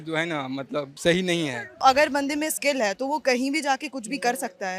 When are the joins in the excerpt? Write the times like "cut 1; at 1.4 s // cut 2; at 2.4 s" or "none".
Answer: cut 1; at 0.9 s // cut 2; at 1.8 s